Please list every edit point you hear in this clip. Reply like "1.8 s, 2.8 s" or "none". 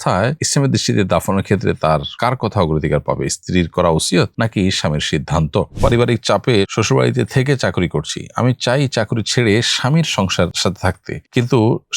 5.7 s